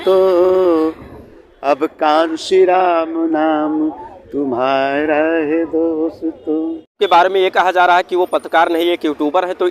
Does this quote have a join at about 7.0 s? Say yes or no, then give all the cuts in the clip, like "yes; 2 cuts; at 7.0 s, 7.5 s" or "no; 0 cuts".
yes; 1 cut; at 7.0 s